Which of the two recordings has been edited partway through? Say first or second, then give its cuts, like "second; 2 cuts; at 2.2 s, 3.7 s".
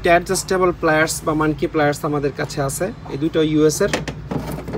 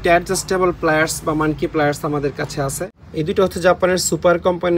second; 1 cut; at 2.9 s